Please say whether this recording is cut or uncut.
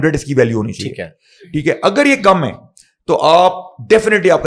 uncut